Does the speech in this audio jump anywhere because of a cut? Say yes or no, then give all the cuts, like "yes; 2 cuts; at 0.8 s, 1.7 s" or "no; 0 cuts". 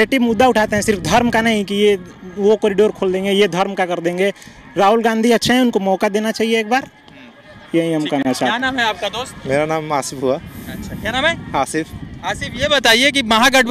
no; 0 cuts